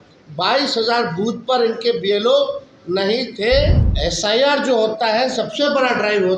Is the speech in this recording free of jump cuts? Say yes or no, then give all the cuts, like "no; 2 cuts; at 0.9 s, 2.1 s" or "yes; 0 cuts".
no; 1 cut; at 3.9 s